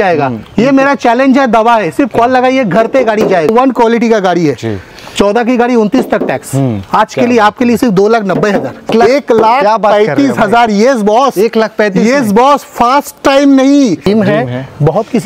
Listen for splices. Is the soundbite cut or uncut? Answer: cut